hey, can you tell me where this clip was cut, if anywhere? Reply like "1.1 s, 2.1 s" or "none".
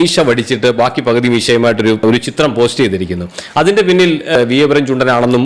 4.4 s